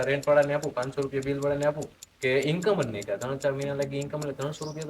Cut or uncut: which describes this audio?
cut